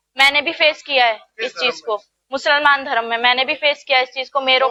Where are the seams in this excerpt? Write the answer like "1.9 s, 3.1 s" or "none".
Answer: none